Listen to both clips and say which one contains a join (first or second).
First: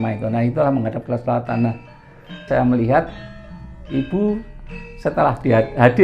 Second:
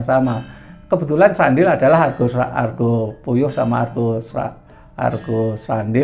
first